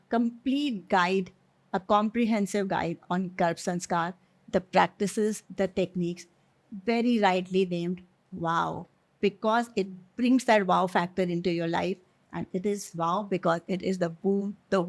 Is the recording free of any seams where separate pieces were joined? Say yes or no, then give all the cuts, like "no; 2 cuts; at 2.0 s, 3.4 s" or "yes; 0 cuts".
yes; 0 cuts